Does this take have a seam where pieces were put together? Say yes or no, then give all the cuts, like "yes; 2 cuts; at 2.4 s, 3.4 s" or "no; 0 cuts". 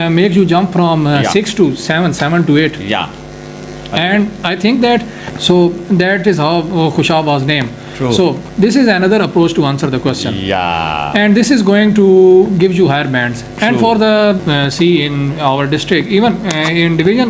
yes; 2 cuts; at 5.3 s, 14.4 s